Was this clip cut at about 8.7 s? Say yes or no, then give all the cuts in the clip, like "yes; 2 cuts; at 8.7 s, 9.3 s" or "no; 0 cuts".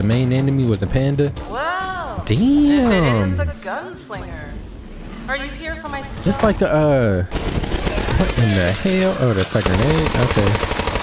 no; 2 cuts; at 1.4 s, 7.2 s